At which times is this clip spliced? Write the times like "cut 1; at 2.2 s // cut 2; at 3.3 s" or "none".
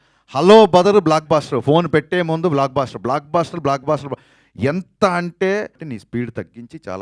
cut 1; at 5.9 s